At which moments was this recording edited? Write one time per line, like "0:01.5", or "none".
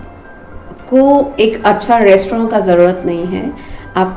none

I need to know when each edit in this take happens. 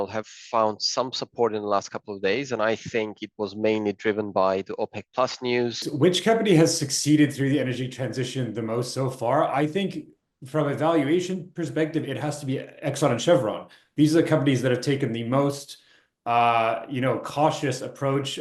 0:05.8

